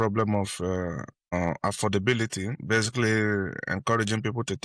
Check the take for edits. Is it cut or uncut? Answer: uncut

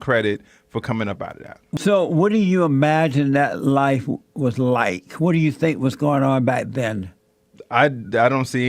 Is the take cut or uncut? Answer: cut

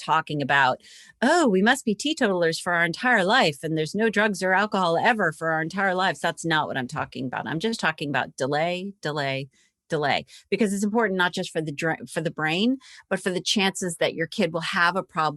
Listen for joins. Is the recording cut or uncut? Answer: uncut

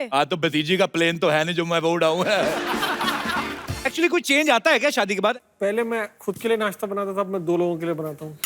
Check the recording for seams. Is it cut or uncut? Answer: cut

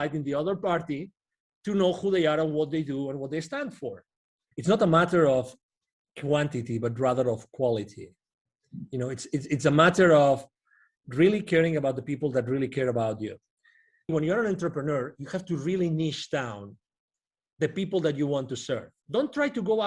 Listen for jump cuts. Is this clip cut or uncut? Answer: cut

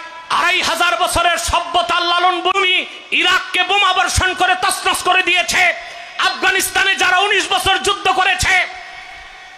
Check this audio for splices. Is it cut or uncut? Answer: cut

